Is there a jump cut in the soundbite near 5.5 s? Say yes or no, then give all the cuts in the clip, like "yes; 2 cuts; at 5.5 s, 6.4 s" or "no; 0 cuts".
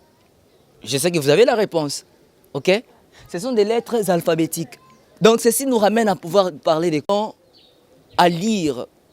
no; 1 cut; at 7.1 s